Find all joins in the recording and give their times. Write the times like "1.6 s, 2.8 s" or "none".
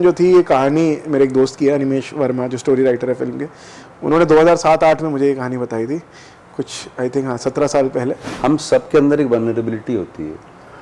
8.3 s

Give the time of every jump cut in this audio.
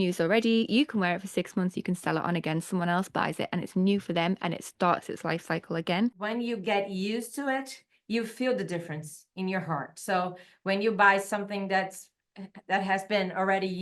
6.2 s

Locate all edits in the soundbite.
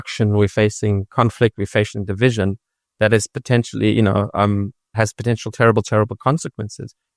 none

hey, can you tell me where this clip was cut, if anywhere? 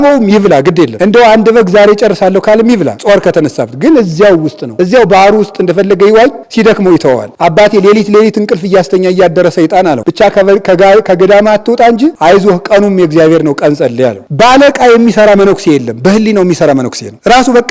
7.3 s, 14.2 s

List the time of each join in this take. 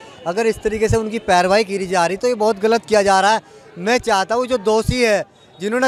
none

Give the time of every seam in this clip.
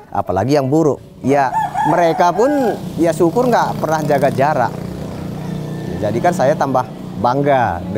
1.1 s, 2.9 s

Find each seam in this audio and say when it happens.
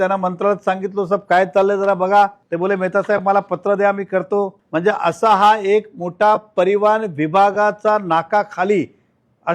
2.4 s, 4.6 s

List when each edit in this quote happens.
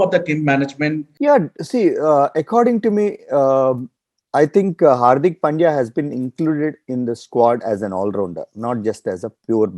1.1 s

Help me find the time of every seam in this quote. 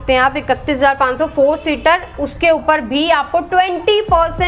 none

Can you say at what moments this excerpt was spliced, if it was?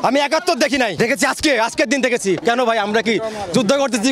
0.9 s, 2.4 s

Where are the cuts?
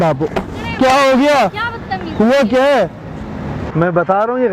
3.6 s

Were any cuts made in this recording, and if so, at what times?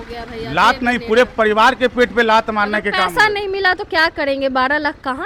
none

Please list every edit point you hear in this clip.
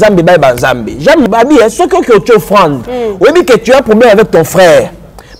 1.2 s

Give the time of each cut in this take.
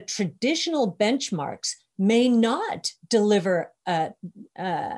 none

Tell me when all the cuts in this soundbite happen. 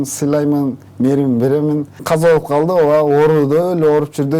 1.9 s

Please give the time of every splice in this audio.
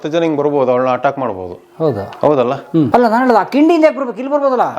none

